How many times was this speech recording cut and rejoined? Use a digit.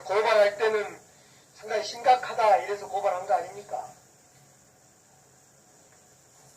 1